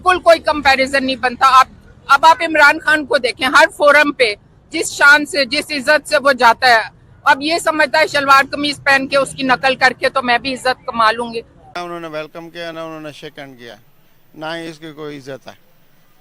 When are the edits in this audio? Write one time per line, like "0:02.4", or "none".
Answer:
0:11.8